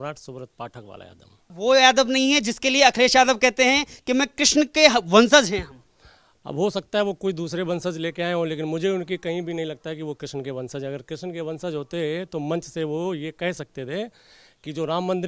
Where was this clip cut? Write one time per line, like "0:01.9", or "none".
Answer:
0:01.5